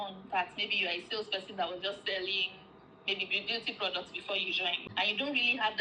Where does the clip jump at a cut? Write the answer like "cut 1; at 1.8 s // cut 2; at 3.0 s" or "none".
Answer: cut 1; at 4.8 s